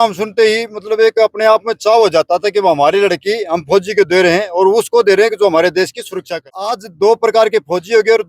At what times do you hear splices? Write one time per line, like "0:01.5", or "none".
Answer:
0:06.9